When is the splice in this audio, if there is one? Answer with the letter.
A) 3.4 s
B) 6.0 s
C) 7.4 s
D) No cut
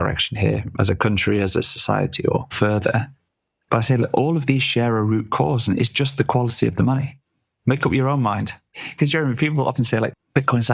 C